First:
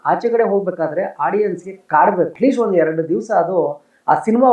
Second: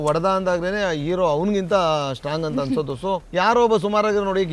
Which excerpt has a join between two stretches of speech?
first; 1 cut; at 2.3 s

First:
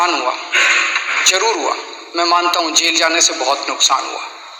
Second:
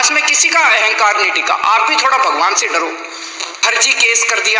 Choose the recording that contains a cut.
second; 1 cut; at 3.5 s

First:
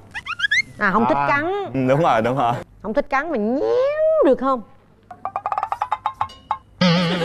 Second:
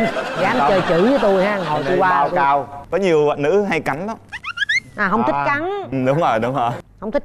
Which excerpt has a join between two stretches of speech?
second; 1 cut; at 2.8 s

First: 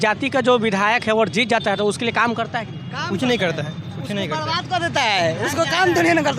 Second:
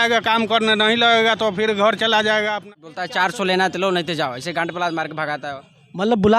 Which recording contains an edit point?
second; 1 cut; at 2.6 s

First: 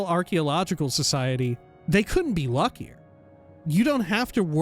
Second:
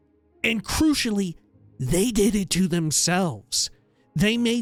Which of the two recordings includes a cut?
first; 2 cuts; at 1.7 s, 3.6 s

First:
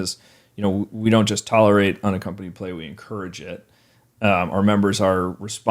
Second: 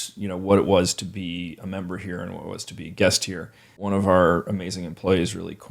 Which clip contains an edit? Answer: second; 1 cut; at 3.9 s

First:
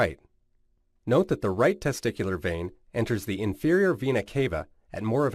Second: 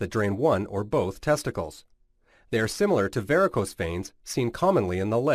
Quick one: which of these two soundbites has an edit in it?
first; 1 cut; at 3.7 s

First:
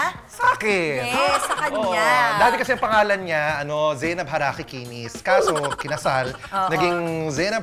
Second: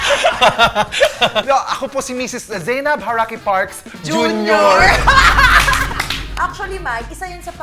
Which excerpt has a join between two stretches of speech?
second; 2 cuts; at 1.4 s, 6.2 s

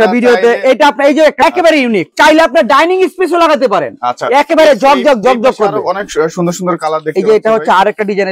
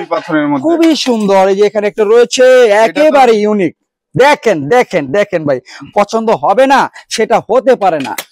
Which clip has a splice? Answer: first; 1 cut; at 1.4 s

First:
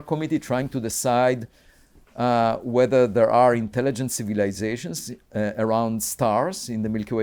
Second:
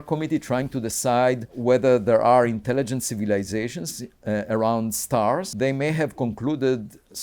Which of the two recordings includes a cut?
second; 2 cuts; at 1.5 s, 5.5 s

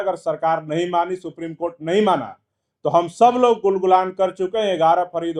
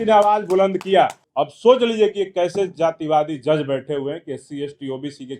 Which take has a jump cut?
second; 1 cut; at 1.2 s

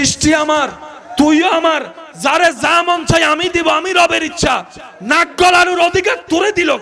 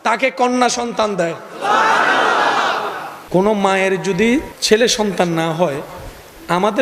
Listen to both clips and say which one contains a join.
second; 2 cuts; at 3.2 s, 4.5 s

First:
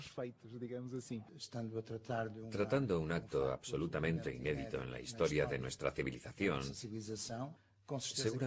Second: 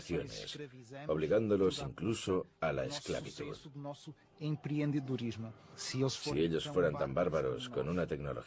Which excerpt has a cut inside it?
first; 1 cut; at 2.8 s

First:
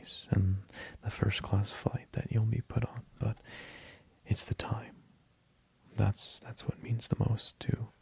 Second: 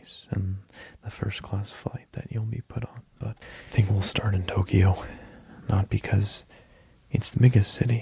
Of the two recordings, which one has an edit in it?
second; 1 cut; at 3.5 s

